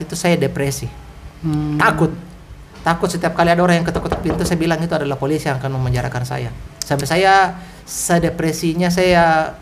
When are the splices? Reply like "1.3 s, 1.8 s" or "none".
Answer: none